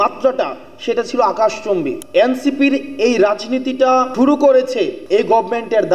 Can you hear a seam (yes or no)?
yes